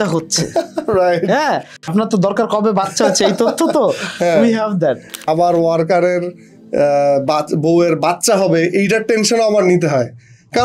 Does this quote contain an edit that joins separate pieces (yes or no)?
yes